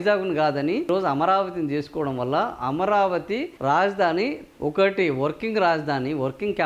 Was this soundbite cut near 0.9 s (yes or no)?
yes